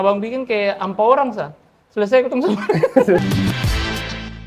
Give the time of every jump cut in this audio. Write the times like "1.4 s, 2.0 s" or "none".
3.2 s